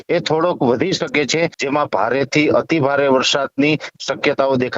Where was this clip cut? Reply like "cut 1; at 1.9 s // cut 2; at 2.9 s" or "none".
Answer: cut 1; at 1.6 s

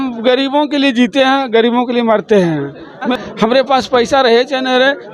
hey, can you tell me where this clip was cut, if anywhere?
cut 1; at 2.9 s

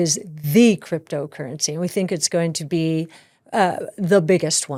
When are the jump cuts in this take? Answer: none

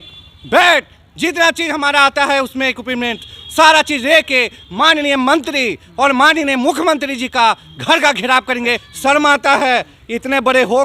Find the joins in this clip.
cut 1; at 8.9 s

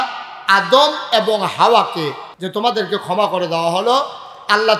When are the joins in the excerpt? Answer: cut 1; at 2.3 s

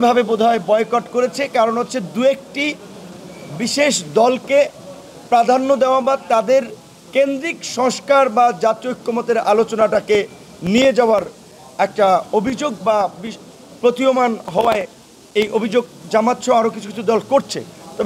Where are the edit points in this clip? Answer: none

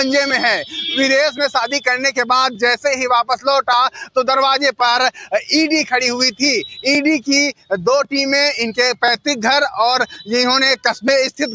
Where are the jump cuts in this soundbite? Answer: cut 1; at 1.1 s

